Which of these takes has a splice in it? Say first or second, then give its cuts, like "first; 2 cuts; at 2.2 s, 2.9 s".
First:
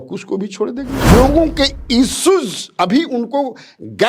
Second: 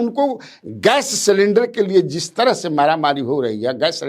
first; 1 cut; at 1.1 s